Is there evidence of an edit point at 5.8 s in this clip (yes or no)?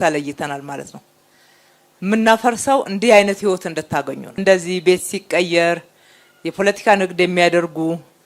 no